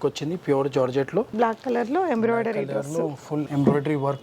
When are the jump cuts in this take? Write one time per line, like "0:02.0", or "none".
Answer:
0:01.3